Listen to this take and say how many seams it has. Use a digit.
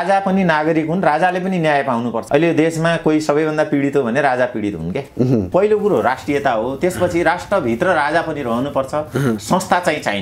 2